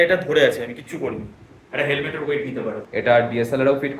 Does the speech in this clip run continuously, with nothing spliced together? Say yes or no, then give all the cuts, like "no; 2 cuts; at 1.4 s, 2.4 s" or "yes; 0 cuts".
no; 1 cut; at 2.8 s